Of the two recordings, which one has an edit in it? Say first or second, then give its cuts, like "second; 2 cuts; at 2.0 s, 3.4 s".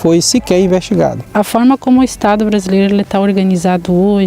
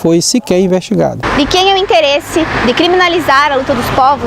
first; 1 cut; at 1.2 s